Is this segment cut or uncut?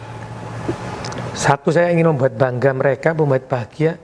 uncut